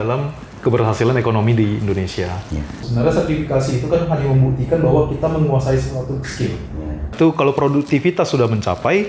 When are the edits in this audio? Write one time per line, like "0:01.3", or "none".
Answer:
0:02.9
0:07.1